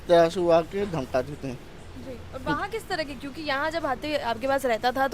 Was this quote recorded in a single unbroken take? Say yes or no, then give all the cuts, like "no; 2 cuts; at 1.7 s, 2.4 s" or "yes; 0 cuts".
yes; 0 cuts